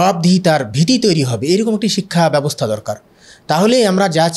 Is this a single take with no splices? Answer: yes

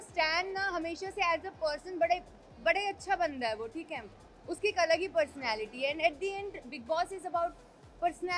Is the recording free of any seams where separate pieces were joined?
yes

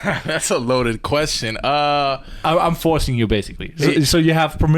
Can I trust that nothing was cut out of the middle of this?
yes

